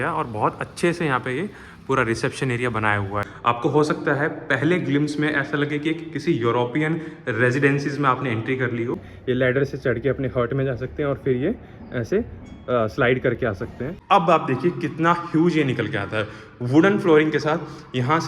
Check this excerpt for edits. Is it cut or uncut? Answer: cut